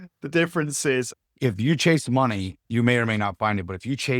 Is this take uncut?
no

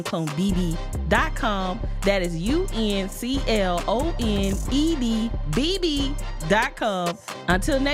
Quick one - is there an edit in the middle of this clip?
no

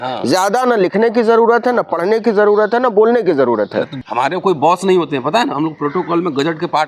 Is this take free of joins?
no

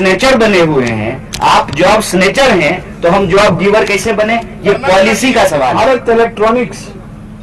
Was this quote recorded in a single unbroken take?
no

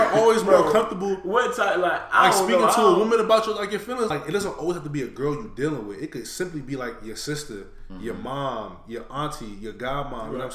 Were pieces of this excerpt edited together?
yes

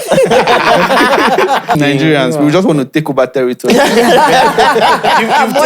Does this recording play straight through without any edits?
no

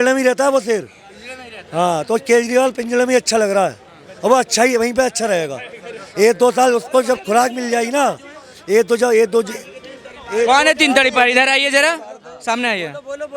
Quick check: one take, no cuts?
yes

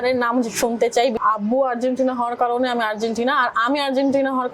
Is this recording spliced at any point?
yes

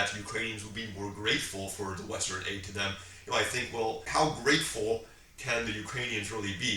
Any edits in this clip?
yes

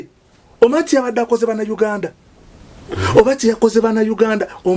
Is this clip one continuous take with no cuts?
yes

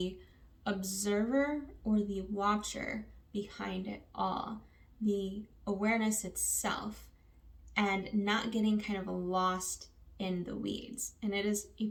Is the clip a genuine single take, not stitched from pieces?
yes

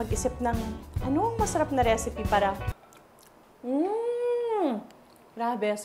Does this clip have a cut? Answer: no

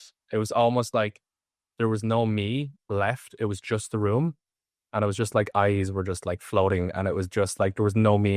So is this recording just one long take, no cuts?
yes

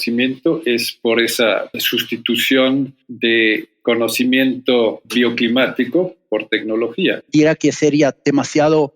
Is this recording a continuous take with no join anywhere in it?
no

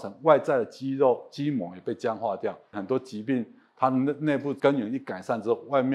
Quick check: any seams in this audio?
yes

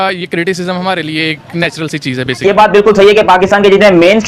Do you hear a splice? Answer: yes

